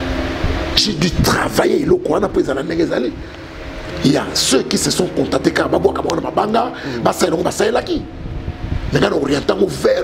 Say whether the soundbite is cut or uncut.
uncut